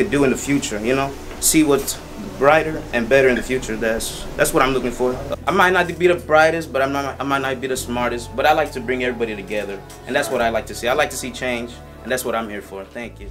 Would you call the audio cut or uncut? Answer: uncut